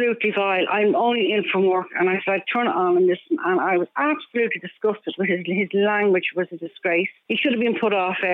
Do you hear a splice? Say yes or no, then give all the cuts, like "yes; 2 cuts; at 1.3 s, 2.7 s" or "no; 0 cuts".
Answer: yes; 1 cut; at 7.2 s